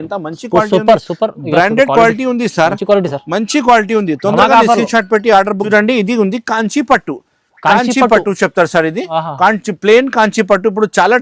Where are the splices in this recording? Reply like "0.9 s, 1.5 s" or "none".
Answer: 5.6 s